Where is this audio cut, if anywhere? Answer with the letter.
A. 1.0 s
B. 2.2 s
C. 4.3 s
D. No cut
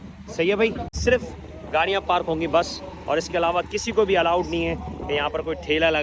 A